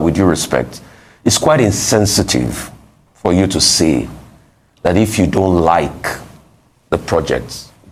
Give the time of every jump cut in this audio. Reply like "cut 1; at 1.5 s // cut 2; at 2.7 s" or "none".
none